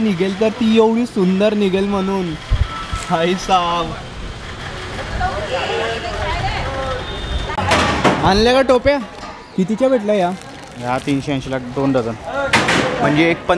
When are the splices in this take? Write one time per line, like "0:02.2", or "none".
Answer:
none